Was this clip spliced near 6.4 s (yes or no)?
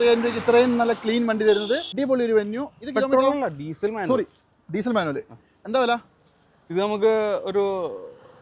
no